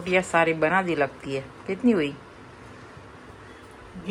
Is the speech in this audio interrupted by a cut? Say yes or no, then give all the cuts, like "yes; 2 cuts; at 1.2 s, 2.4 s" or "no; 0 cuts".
no; 0 cuts